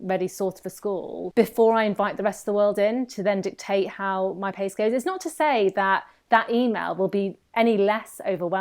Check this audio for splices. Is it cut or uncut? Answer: cut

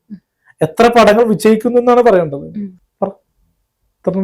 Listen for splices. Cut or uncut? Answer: cut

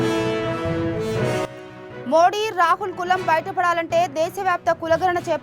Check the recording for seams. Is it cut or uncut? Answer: cut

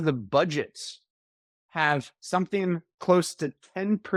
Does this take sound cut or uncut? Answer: uncut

